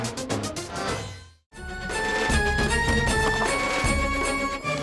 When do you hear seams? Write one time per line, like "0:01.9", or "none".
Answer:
0:01.8